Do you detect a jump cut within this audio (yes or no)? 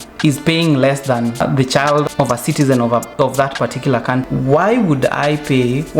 yes